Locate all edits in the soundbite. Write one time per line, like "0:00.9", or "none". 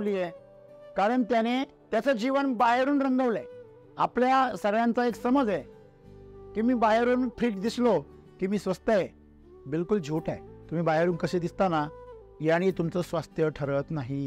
0:01.8
0:10.5

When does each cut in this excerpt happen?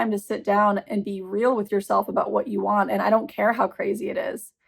none

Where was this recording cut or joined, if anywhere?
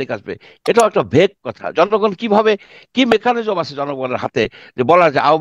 none

